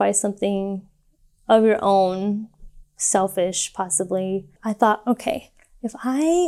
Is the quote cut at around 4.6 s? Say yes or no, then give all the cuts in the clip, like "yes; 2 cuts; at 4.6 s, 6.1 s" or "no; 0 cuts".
yes; 1 cut; at 4.6 s